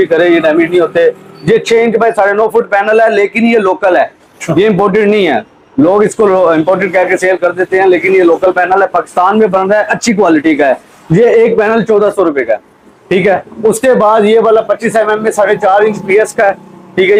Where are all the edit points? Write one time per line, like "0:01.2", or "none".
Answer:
none